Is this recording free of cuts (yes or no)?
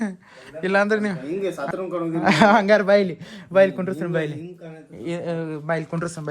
no